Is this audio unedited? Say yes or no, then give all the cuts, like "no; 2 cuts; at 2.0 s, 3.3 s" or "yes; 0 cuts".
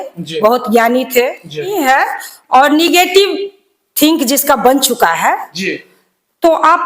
no; 1 cut; at 1.7 s